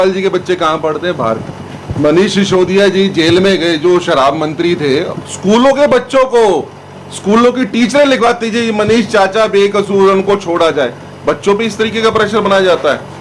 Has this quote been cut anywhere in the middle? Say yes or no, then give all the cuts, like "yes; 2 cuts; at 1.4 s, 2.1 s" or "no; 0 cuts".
no; 0 cuts